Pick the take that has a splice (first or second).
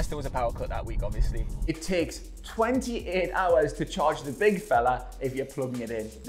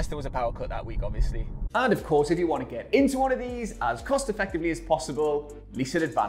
first